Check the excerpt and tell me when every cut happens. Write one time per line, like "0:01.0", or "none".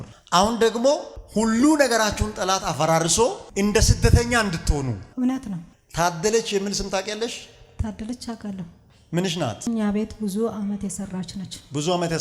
0:05.7